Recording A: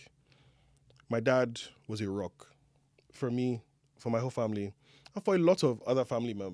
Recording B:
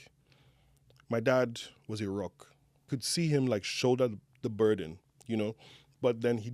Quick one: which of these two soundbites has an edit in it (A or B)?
B